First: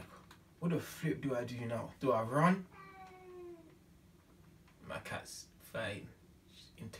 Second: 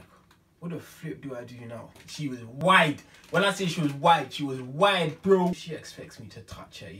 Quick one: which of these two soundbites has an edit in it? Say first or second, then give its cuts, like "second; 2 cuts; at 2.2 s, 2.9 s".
second; 2 cuts; at 1.9 s, 5.8 s